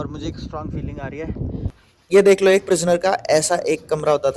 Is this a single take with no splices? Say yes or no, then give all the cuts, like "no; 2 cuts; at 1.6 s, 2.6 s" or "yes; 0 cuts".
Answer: no; 1 cut; at 1.8 s